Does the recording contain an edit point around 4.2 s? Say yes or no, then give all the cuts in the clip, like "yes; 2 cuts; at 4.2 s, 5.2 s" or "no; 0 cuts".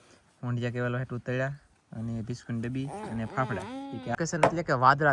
yes; 1 cut; at 4.2 s